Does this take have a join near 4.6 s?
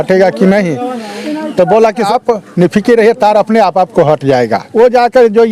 yes; 2 cuts; at 2.1 s, 4.6 s

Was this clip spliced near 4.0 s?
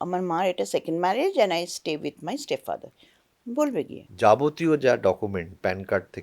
yes; 1 cut; at 4.0 s

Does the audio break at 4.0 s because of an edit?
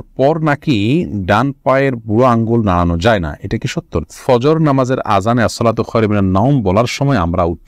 yes; 1 cut; at 4.0 s

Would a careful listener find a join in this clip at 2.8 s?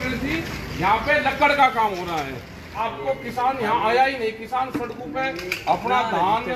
yes; 1 cut; at 2.8 s

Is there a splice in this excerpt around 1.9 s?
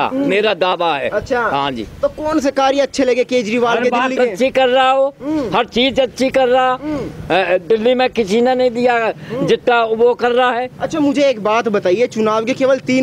no; 0 cuts

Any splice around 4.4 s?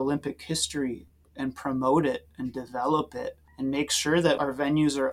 yes; 3 cuts; at 1.1 s, 3.4 s, 4.4 s

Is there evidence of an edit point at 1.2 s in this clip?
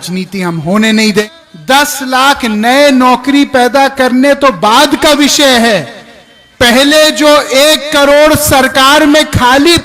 yes; 1 cut; at 1.2 s

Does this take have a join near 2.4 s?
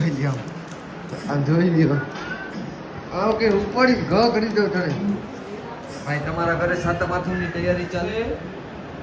yes; 3 cuts; at 2.4 s, 5.0 s, 8.1 s

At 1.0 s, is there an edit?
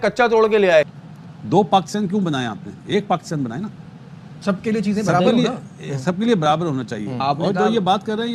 yes; 1 cut; at 1.0 s

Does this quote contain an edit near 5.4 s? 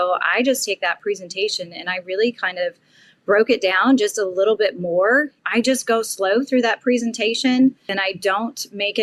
yes; 2 cuts; at 5.4 s, 7.9 s

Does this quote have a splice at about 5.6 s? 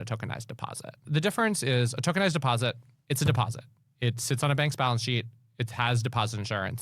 no; 1 cut; at 1.0 s

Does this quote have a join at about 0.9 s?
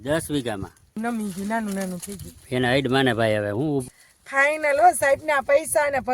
yes; 2 cuts; at 0.9 s, 3.8 s

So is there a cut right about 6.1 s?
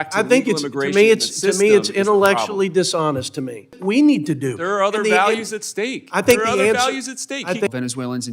no; 2 cuts; at 3.7 s, 7.7 s

